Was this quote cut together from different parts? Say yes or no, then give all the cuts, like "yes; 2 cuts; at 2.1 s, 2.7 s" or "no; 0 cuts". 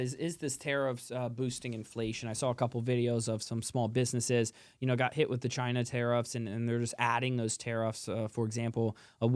no; 0 cuts